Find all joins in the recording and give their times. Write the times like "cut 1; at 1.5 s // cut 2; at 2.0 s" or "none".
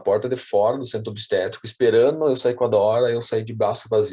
none

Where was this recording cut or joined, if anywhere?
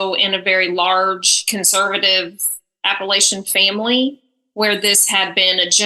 none

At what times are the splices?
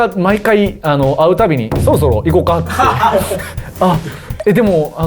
none

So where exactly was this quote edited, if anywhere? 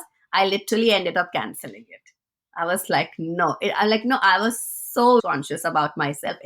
cut 1; at 5.2 s

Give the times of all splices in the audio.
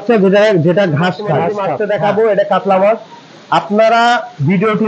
cut 1; at 1.6 s

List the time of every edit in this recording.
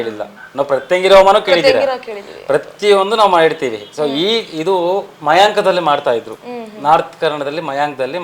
none

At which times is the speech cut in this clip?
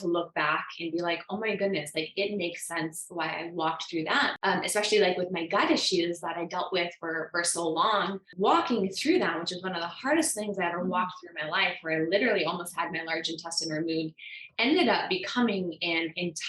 cut 1; at 4.3 s // cut 2; at 8.2 s

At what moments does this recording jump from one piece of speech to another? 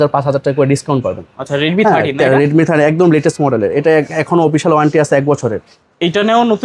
none

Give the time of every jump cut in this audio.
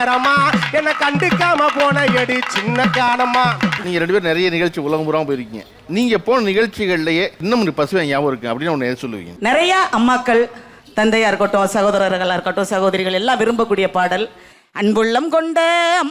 cut 1; at 3.8 s

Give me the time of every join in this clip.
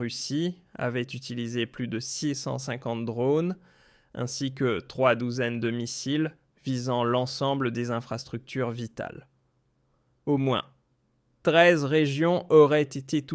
none

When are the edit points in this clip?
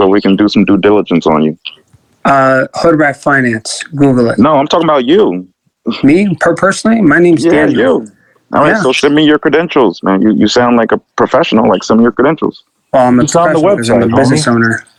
none

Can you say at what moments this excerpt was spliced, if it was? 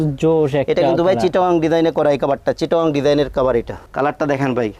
cut 1; at 3.8 s

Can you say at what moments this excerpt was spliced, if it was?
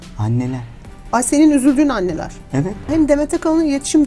cut 1; at 2.8 s

